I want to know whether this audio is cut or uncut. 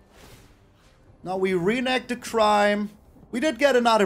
cut